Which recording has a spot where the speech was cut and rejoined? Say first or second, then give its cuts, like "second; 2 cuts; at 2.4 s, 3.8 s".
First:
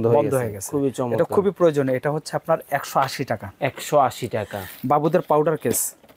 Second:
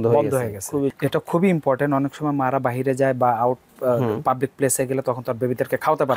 second; 1 cut; at 1.0 s